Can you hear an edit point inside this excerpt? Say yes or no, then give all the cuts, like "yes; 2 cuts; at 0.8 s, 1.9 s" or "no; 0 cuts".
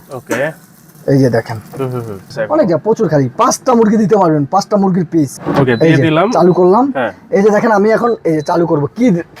yes; 2 cuts; at 2.3 s, 5.4 s